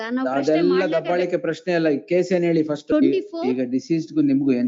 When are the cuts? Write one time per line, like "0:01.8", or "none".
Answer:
0:02.9